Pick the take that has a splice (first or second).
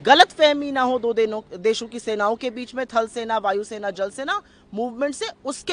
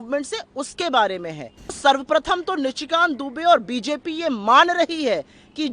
second